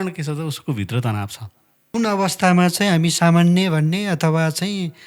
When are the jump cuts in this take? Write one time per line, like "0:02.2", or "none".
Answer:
0:01.8